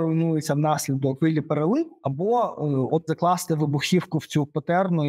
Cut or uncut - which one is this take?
cut